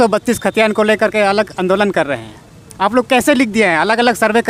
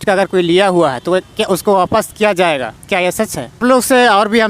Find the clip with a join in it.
second; 1 cut; at 3.6 s

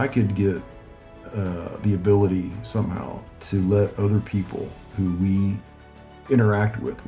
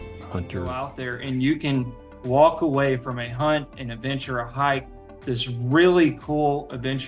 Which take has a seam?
second; 1 cut; at 0.9 s

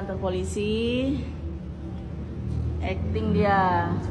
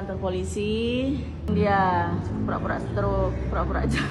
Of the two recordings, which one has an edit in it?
second; 1 cut; at 1.5 s

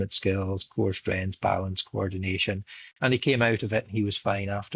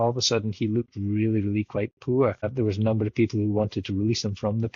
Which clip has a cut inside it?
second; 1 cut; at 2.5 s

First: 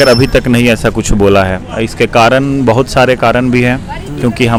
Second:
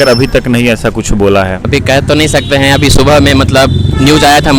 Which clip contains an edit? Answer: second; 1 cut; at 1.6 s

